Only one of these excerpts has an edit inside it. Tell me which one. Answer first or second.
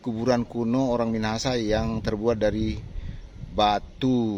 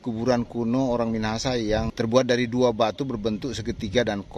second